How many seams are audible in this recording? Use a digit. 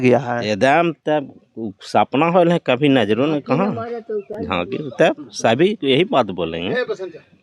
0